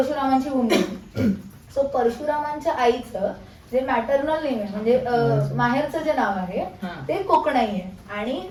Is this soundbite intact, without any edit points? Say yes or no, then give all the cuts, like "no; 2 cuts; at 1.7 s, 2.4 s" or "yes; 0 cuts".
yes; 0 cuts